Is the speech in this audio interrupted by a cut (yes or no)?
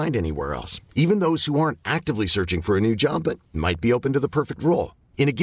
no